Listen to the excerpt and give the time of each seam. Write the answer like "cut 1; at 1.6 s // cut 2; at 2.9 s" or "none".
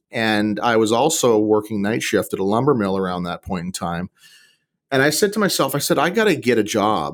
none